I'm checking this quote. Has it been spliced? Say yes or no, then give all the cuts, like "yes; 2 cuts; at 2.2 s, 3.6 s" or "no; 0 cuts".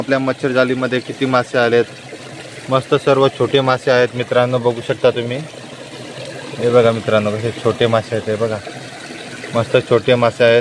no; 0 cuts